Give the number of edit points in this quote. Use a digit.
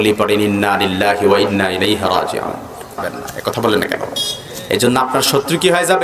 1